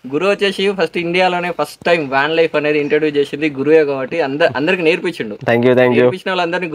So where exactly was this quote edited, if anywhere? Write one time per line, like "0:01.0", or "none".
none